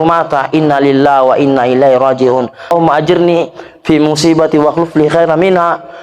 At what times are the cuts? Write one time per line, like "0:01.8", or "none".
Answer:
0:02.7